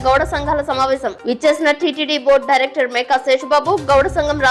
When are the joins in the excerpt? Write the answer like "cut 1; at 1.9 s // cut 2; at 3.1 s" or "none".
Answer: none